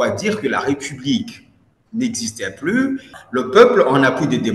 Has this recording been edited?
yes; 1 cut; at 3.1 s

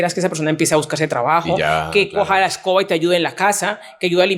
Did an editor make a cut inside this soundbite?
no; 0 cuts

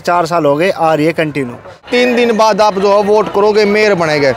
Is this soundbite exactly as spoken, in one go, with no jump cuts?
no; 1 cut; at 1.8 s

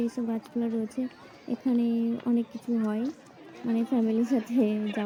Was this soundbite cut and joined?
no; 0 cuts

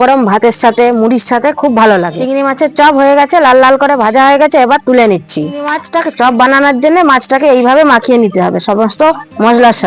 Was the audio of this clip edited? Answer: yes; 2 cuts; at 2.2 s, 5.8 s

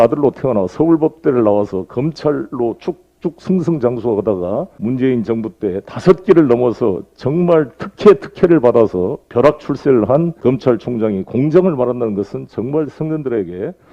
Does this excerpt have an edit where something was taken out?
yes; 2 cuts; at 4.7 s, 10.3 s

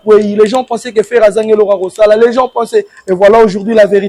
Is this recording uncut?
yes; 0 cuts

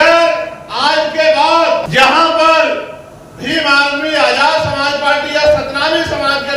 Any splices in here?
yes; 1 cut; at 1.9 s

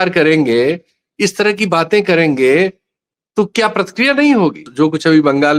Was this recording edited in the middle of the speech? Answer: yes; 1 cut; at 4.7 s

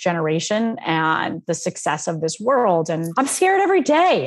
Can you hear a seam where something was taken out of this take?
yes; 1 cut; at 3.1 s

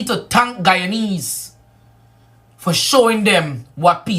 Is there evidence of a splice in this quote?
yes; 1 cut; at 1.7 s

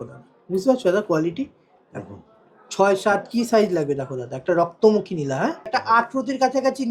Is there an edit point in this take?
yes; 1 cut; at 5.7 s

